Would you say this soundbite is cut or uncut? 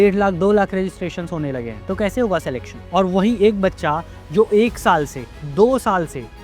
cut